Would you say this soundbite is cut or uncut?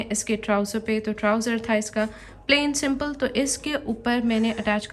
uncut